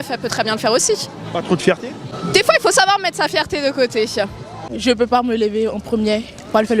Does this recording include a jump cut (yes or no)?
yes